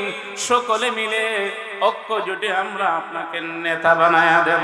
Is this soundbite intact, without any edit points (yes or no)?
yes